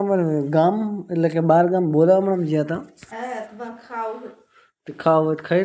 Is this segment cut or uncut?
uncut